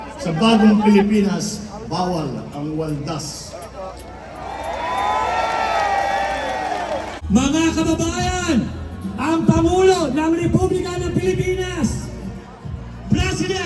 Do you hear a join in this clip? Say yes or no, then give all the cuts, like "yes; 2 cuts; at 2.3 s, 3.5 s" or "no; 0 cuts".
yes; 1 cut; at 7.1 s